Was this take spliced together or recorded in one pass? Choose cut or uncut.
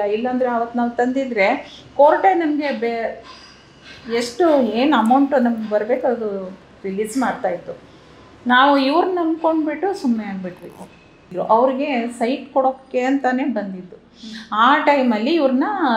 cut